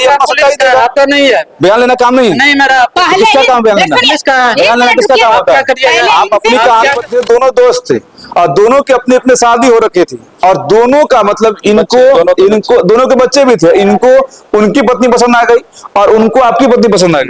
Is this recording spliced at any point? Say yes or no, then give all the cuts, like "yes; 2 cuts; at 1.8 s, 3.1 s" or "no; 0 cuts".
yes; 1 cut; at 7.0 s